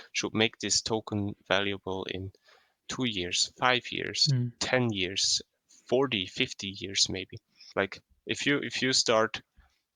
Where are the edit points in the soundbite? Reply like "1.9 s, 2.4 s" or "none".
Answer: 1.4 s, 7.6 s